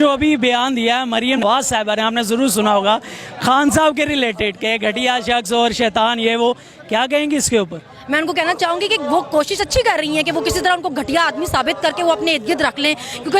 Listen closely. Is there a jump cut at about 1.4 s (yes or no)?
yes